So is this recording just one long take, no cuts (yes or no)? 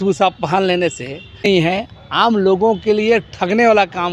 no